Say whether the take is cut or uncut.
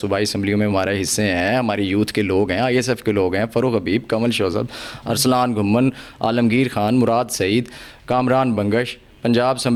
uncut